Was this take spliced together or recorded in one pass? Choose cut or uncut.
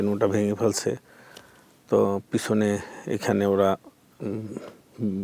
uncut